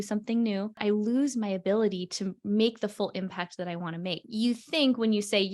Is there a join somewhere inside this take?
yes; 2 cuts; at 0.8 s, 4.2 s

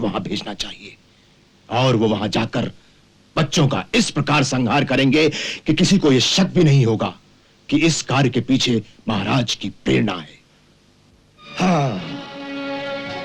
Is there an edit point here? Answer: no; 0 cuts

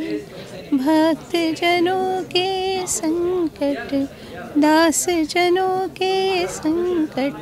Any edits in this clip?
no; 0 cuts

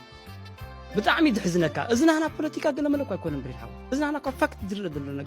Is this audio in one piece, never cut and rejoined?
no; 1 cut; at 0.9 s

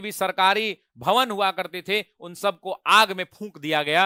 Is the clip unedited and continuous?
yes; 0 cuts

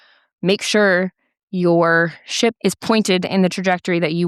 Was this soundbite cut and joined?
yes; 1 cut; at 2.6 s

